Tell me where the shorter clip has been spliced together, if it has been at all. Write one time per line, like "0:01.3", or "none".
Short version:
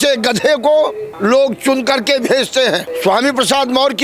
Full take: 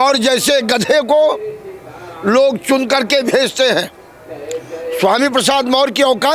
0:01.0
0:02.9